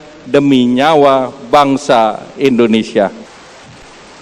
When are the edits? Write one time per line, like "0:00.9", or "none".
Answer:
0:03.2